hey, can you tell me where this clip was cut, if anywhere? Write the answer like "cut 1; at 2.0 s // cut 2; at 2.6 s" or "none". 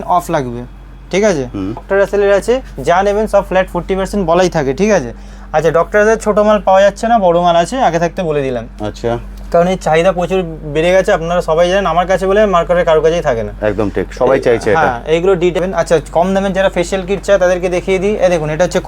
cut 1; at 1.8 s // cut 2; at 15.6 s